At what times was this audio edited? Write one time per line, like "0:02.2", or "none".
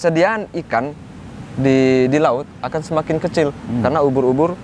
none